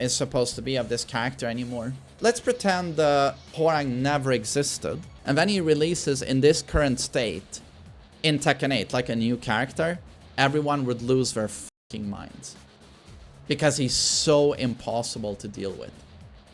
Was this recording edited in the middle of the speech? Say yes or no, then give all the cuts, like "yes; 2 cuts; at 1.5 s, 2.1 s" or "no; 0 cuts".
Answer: yes; 2 cuts; at 2.0 s, 5.1 s